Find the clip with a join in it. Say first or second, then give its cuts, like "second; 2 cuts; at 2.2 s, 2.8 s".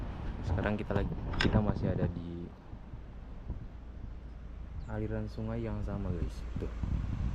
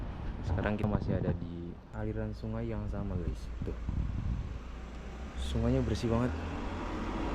second; 2 cuts; at 0.8 s, 1.8 s